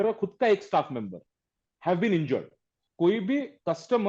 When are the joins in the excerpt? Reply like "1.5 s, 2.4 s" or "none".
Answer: 2.8 s